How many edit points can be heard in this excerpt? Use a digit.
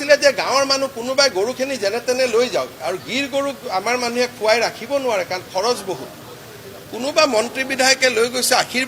0